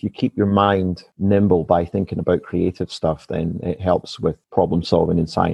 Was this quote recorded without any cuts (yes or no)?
no